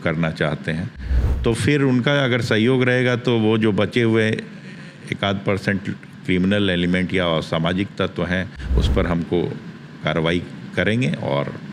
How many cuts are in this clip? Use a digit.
0